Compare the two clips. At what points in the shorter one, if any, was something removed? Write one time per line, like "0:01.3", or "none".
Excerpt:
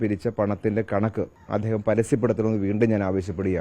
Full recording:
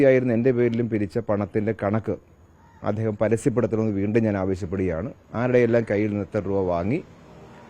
0:01.4